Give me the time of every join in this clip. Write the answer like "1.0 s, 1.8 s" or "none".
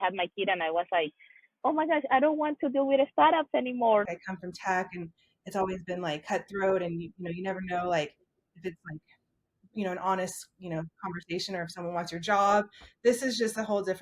4.1 s

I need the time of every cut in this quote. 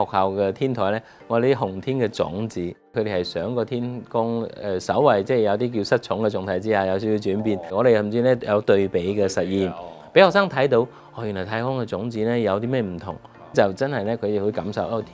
2.9 s, 7.7 s, 13.5 s

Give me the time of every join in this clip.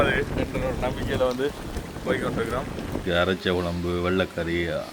3.0 s

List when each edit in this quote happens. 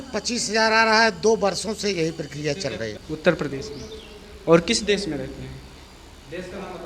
3.0 s

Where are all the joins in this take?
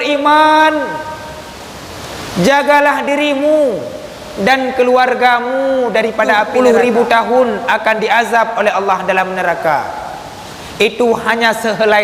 6.5 s

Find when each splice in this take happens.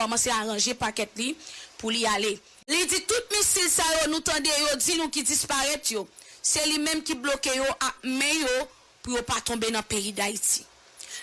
2.7 s

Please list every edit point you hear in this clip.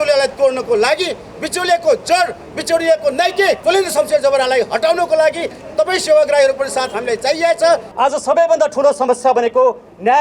3.6 s, 7.9 s

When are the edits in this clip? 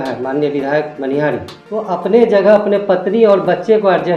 1.5 s

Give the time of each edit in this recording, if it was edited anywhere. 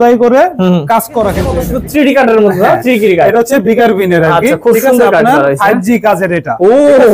1.6 s

